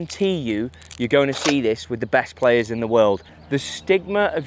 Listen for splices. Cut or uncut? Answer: cut